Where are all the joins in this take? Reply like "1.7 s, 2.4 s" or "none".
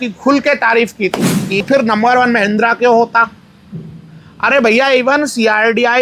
1.6 s